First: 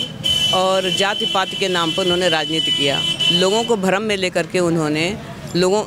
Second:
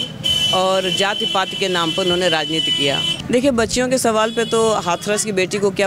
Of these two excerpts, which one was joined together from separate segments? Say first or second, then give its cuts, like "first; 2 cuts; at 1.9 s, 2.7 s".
second; 1 cut; at 3.1 s